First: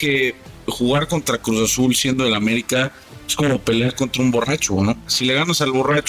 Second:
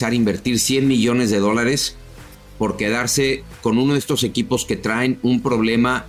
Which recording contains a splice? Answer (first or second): first